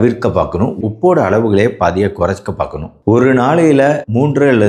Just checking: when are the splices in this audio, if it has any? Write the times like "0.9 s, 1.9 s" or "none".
2.9 s